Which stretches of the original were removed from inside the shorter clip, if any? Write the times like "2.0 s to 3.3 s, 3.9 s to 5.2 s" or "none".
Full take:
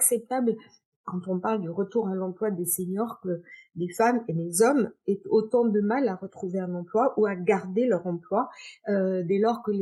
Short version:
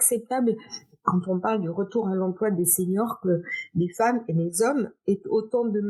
none